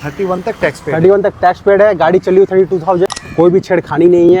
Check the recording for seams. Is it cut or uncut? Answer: cut